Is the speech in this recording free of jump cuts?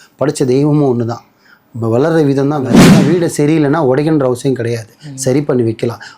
no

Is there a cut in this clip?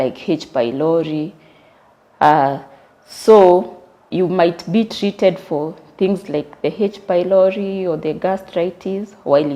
yes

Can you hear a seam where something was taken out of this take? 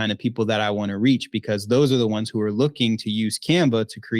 no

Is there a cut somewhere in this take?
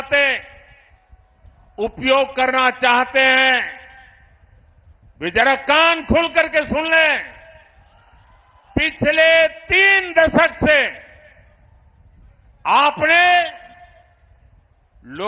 no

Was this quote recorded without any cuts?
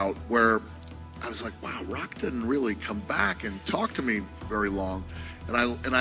yes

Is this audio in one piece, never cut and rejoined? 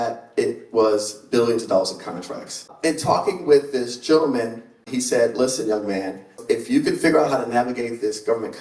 no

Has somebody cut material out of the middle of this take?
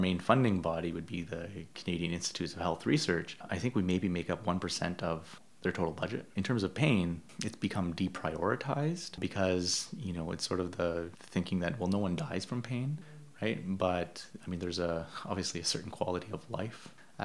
no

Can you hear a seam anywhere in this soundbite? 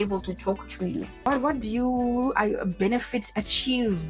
yes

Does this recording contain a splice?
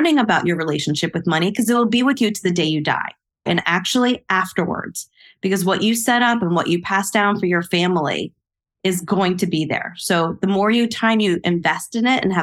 yes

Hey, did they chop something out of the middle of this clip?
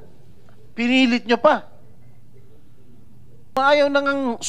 yes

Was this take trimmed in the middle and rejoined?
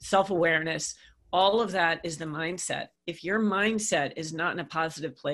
yes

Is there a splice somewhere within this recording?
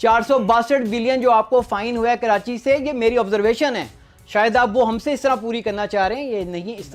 no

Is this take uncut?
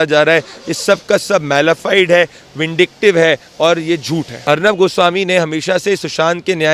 no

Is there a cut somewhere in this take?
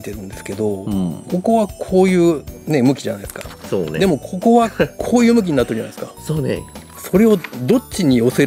no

